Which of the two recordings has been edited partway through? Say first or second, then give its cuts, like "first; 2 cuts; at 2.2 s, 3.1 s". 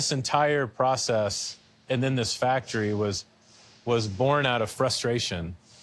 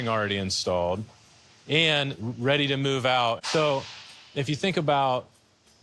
second; 1 cut; at 3.4 s